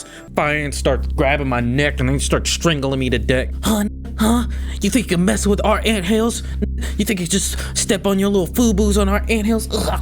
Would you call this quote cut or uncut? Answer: uncut